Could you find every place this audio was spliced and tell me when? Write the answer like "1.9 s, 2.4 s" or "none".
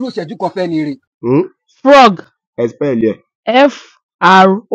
1.0 s